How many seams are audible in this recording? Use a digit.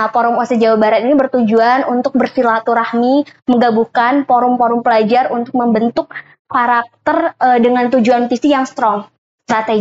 0